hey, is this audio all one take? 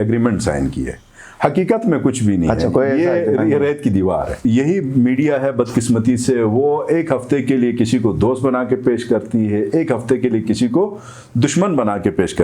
no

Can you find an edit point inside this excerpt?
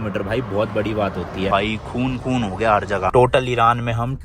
yes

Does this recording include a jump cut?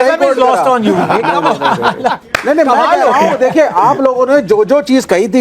no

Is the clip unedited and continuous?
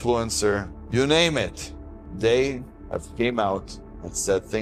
yes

